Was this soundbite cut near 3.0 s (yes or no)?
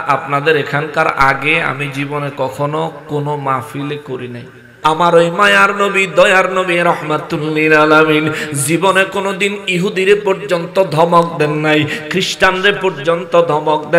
no